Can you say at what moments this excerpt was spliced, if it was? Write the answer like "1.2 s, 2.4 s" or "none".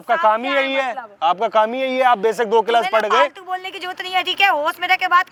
none